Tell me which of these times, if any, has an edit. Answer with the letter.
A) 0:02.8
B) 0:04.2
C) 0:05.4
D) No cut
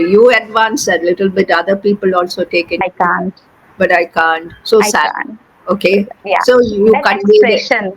A